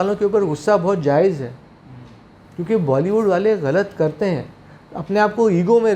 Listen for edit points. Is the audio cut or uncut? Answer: uncut